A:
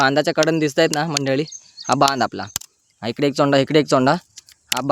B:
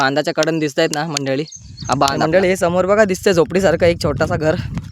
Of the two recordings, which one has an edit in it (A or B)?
B